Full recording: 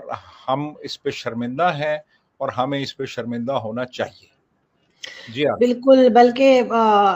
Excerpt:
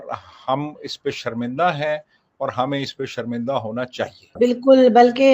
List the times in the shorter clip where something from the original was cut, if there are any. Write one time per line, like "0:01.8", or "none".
0:04.4